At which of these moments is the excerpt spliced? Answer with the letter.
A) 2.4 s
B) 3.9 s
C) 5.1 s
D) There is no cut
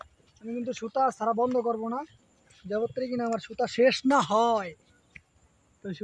D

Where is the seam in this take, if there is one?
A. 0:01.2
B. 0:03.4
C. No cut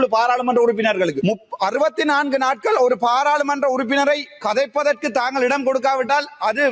A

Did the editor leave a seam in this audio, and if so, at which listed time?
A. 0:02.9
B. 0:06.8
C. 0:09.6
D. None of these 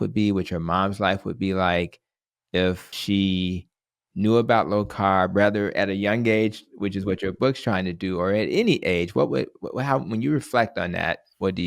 A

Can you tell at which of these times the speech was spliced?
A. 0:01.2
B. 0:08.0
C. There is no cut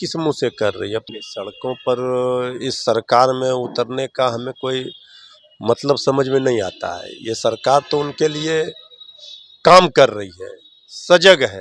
A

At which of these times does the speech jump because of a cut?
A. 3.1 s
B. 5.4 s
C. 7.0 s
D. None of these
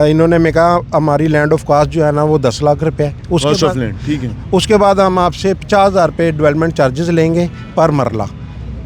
D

